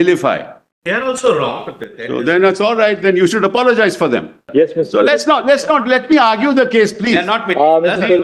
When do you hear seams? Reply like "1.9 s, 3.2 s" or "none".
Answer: 4.4 s